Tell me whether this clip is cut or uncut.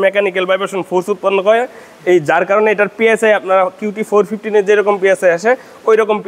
uncut